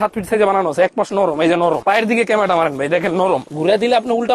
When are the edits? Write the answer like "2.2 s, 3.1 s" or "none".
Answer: 1.8 s, 3.5 s

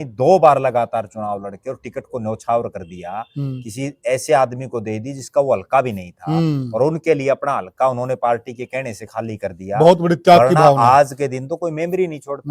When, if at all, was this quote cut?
none

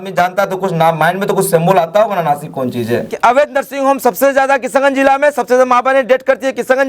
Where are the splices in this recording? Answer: 3.1 s

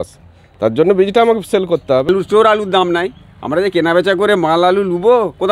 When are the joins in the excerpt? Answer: 2.1 s

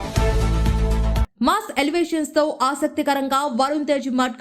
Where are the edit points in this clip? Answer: 1.2 s

